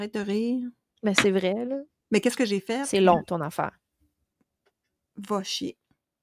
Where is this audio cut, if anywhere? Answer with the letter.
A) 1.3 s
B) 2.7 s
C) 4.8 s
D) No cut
B